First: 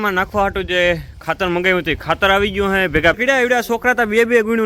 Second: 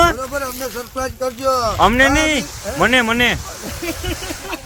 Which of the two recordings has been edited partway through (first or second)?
first